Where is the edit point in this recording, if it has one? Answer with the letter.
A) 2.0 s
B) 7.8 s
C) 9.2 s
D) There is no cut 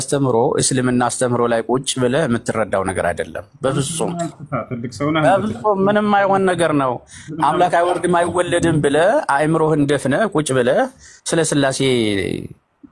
D